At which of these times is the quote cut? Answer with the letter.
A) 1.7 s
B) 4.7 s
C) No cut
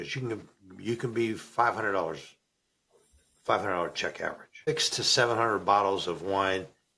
B